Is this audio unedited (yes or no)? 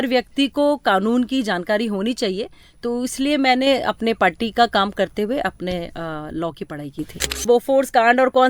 no